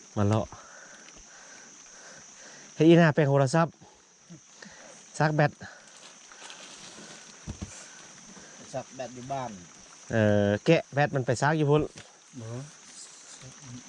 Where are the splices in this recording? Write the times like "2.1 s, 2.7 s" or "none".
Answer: none

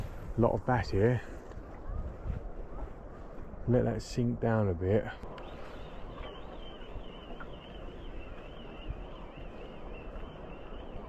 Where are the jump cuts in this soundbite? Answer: 5.2 s

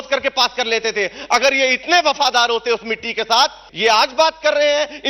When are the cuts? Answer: 3.6 s

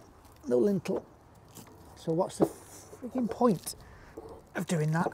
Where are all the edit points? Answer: none

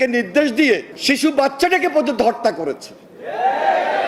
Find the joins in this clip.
0.9 s

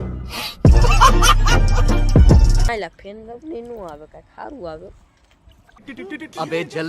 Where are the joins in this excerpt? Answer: 2.7 s

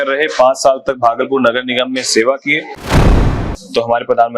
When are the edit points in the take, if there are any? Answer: 3.0 s

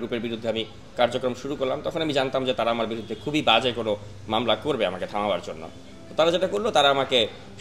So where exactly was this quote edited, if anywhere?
none

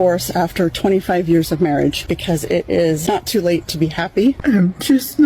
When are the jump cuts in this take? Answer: 2.0 s, 3.0 s, 4.4 s

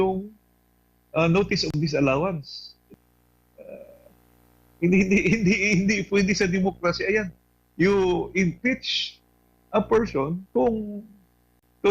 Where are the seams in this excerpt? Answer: 2.9 s

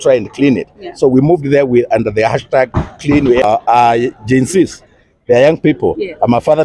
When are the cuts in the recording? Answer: 3.4 s

